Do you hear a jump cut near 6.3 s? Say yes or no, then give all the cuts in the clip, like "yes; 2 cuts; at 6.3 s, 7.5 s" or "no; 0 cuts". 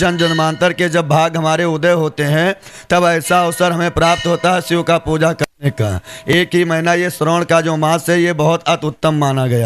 no; 0 cuts